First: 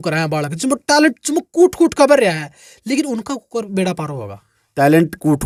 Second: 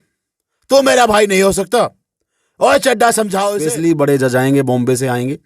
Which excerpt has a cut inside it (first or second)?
second